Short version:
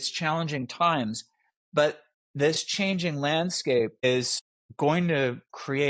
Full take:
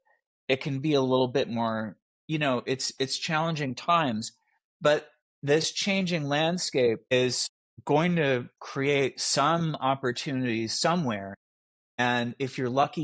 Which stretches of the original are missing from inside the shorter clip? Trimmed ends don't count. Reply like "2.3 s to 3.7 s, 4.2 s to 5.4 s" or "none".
none